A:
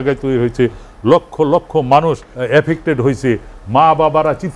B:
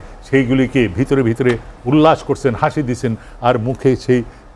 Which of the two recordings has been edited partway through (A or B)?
A